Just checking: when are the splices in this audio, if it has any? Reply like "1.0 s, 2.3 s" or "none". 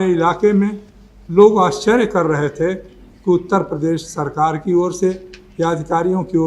none